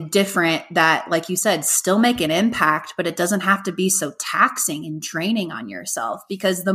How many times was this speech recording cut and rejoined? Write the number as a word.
zero